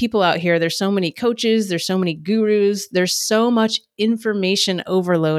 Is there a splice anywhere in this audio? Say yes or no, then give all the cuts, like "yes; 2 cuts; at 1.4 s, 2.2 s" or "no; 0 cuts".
no; 0 cuts